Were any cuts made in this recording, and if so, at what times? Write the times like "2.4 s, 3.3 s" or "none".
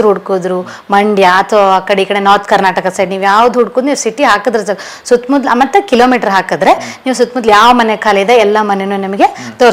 none